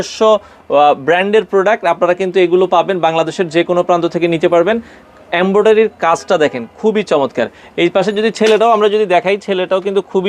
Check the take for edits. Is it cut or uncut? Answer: uncut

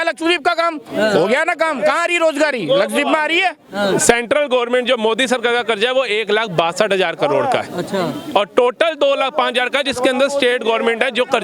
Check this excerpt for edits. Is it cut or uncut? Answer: uncut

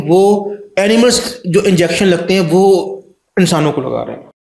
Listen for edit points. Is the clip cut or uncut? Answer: uncut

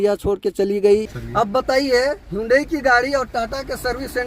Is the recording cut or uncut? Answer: cut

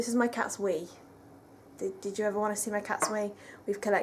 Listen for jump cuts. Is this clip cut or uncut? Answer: uncut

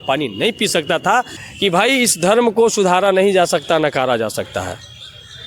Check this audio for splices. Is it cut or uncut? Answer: cut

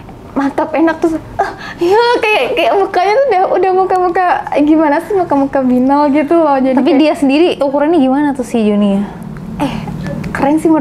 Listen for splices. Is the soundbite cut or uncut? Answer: uncut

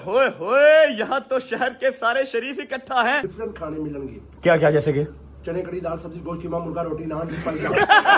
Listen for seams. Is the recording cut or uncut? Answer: cut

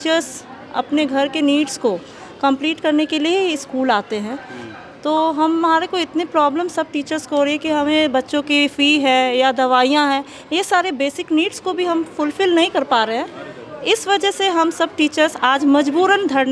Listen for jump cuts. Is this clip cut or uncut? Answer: uncut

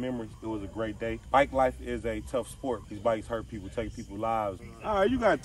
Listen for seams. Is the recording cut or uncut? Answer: cut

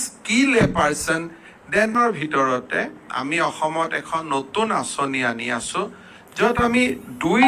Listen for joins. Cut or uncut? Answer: cut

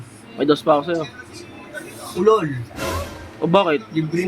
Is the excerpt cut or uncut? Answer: uncut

